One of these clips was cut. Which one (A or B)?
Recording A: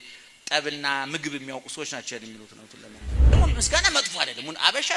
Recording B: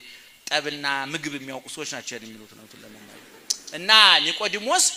A